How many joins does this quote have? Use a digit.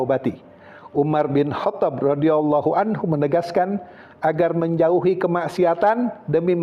0